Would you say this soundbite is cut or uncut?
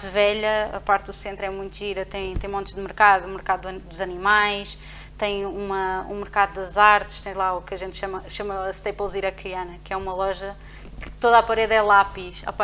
uncut